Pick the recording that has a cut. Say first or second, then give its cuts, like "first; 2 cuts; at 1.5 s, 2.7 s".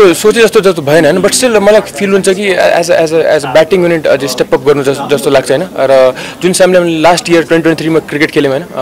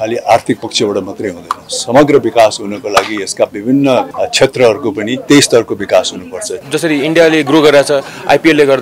second; 3 cuts; at 4.1 s, 5.2 s, 6.6 s